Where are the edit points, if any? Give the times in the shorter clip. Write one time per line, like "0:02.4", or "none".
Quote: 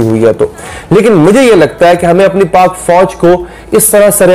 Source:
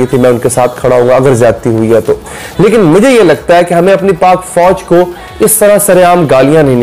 none